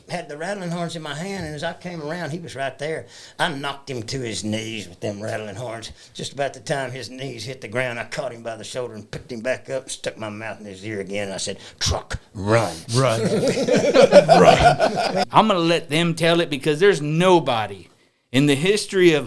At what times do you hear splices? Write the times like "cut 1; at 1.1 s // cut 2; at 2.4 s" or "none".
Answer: cut 1; at 15.3 s